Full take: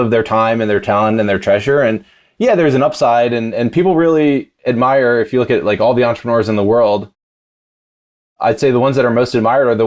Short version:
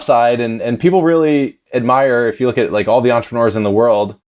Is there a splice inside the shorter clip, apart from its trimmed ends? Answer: no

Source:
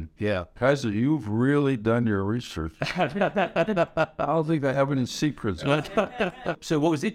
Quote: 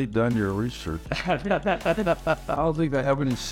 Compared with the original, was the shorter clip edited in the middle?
no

